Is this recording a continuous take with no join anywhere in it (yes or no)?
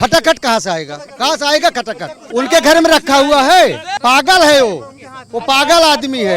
no